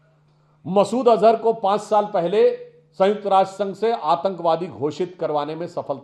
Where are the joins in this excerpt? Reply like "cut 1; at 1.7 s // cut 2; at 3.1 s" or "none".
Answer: none

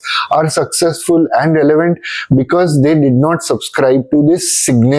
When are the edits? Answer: none

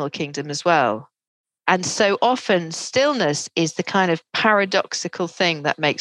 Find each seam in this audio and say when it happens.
none

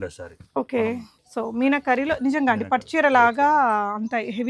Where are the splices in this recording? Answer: cut 1; at 1.1 s

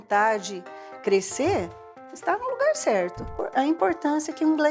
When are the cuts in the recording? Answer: cut 1; at 3.4 s

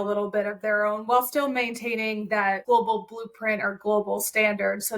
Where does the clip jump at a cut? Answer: cut 1; at 2.6 s

